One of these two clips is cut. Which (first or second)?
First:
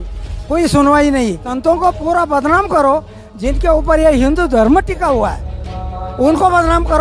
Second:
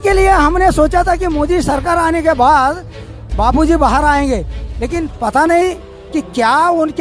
first